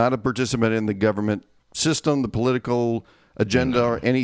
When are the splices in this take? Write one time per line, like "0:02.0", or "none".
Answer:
none